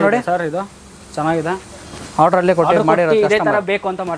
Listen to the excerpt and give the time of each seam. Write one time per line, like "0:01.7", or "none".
none

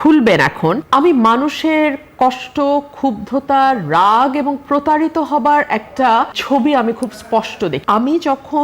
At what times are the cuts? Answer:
0:00.8
0:06.4
0:07.8

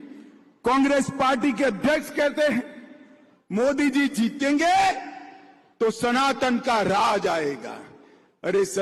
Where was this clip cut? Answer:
none

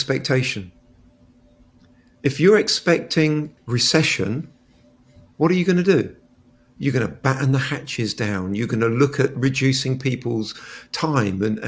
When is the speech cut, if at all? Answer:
0:03.6

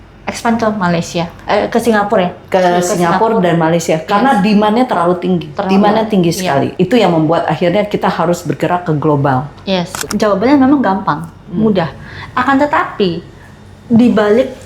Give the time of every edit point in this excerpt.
0:09.9

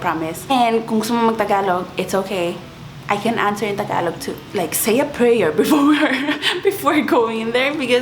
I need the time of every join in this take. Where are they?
0:04.3

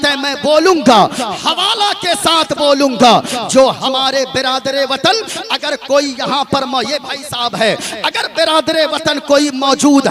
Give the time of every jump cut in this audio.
none

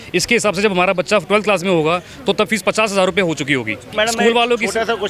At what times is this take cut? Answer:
0:03.9

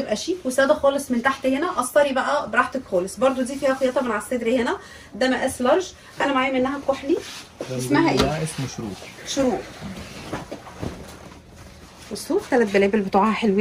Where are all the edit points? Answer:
none

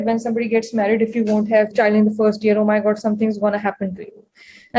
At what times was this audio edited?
0:01.7

